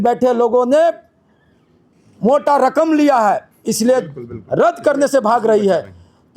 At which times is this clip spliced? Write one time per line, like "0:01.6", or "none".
none